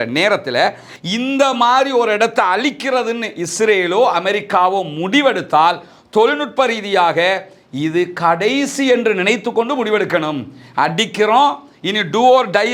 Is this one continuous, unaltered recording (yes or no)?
no